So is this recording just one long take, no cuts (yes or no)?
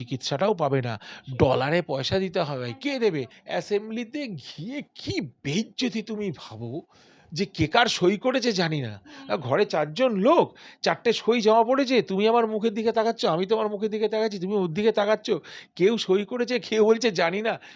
no